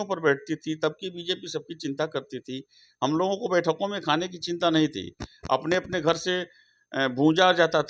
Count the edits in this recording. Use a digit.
0